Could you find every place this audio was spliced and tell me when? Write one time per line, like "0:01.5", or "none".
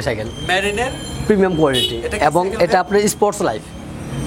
none